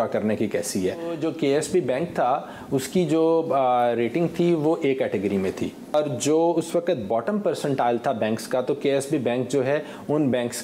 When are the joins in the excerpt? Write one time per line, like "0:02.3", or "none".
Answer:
0:01.2
0:05.9

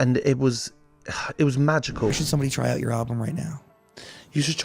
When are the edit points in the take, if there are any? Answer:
0:02.2

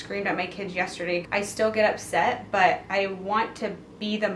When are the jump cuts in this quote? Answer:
0:01.3

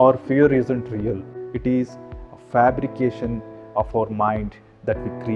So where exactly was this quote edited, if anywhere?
0:01.3

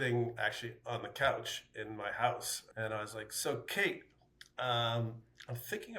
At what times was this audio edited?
0:02.6

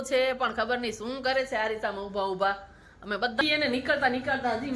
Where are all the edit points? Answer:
0:03.4

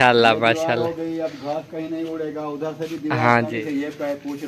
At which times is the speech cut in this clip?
0:03.6

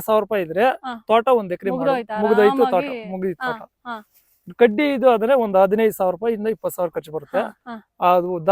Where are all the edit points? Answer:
none

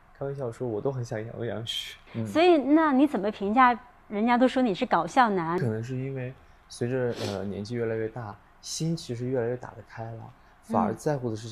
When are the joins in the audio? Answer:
0:02.1
0:05.6

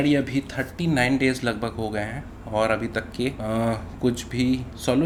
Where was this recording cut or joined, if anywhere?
none

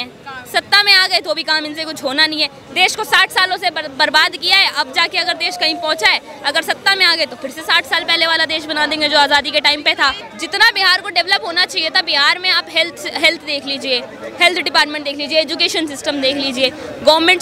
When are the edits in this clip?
0:10.3

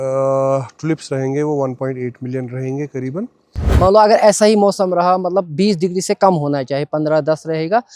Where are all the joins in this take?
0:03.6

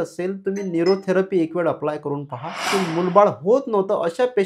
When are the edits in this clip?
0:02.7

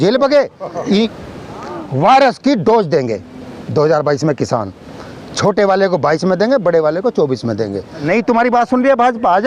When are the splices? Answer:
0:01.1
0:08.0

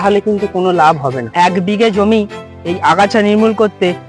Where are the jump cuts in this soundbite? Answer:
0:01.2

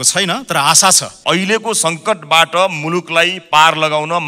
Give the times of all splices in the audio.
0:01.1

